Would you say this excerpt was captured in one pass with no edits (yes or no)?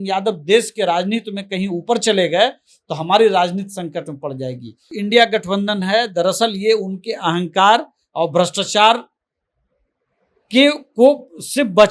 no